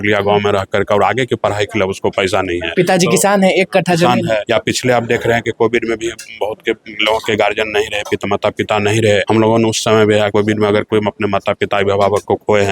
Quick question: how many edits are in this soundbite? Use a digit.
4